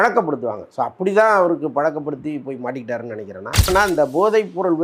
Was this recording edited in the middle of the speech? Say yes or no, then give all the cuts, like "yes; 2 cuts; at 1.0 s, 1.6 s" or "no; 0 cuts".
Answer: yes; 1 cut; at 3.7 s